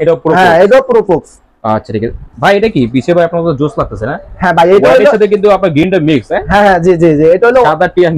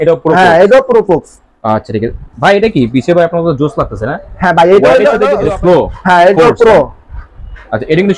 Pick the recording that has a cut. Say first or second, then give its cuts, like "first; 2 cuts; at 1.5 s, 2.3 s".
second; 1 cut; at 5.3 s